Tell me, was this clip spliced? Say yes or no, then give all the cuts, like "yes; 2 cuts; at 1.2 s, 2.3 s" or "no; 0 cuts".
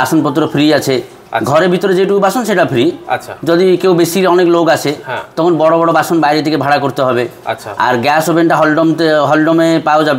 no; 0 cuts